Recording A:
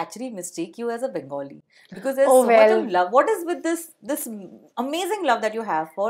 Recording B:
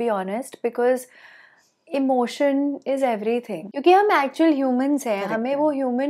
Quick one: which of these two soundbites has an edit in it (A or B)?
B